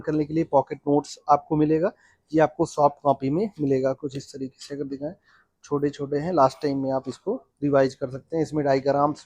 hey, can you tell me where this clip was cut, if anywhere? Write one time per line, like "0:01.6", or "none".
none